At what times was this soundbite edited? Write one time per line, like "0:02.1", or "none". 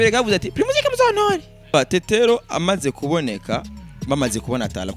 0:01.7